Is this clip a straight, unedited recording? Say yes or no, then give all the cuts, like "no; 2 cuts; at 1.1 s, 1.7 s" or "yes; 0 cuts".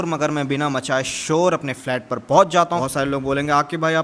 no; 1 cut; at 2.8 s